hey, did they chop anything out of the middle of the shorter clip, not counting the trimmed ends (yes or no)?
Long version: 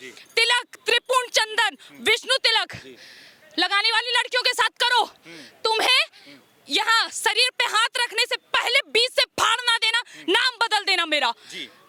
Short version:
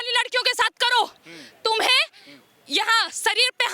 no